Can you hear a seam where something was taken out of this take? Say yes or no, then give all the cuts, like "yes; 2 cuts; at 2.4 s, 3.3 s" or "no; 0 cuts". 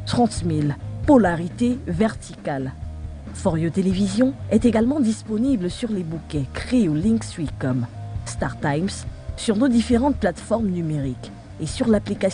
no; 0 cuts